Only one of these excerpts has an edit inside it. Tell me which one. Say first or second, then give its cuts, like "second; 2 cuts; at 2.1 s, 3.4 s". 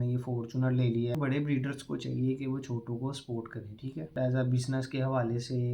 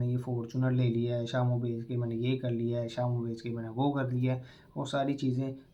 first; 2 cuts; at 1.1 s, 4.2 s